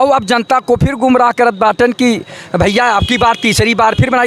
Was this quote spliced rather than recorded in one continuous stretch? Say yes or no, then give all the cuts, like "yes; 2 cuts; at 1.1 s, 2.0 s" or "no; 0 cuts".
no; 0 cuts